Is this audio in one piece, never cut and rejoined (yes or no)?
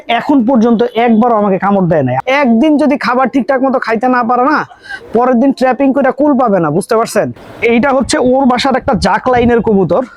no